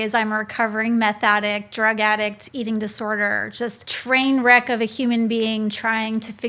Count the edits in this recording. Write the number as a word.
one